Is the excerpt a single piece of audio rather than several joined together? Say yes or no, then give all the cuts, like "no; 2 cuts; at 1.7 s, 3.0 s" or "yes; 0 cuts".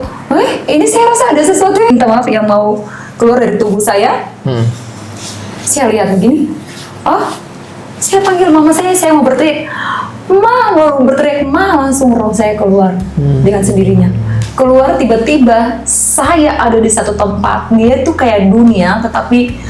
no; 1 cut; at 1.9 s